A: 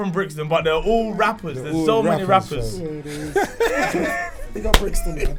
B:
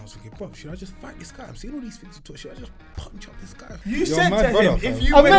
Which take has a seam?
B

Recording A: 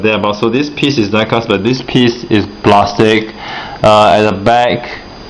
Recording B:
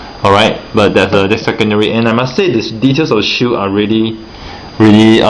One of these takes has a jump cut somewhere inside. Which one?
A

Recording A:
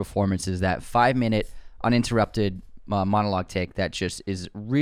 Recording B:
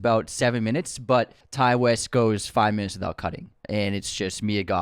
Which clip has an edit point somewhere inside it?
B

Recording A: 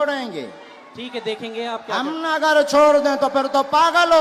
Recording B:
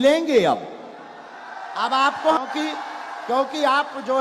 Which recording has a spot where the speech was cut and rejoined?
B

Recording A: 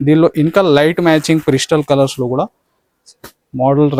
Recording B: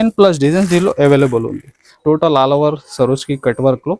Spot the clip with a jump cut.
B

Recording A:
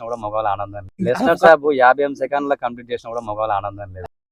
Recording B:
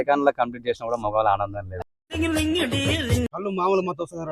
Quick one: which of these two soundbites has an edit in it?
B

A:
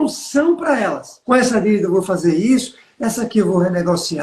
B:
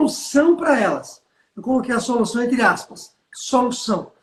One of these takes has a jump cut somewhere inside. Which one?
A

